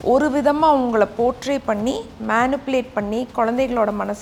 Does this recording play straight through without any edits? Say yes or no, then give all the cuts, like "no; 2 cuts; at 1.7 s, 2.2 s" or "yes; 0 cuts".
yes; 0 cuts